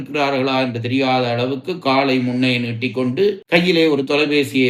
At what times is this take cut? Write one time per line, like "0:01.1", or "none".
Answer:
none